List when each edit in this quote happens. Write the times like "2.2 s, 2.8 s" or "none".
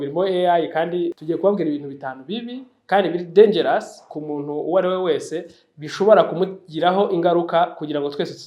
1.2 s